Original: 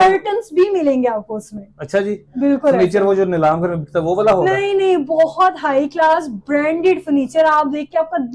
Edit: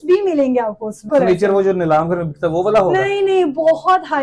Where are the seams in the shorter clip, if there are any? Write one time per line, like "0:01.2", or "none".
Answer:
0:01.1